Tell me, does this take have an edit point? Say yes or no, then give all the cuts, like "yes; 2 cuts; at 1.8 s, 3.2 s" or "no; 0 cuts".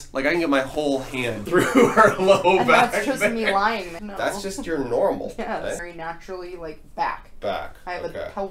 yes; 3 cuts; at 1.3 s, 4.0 s, 5.9 s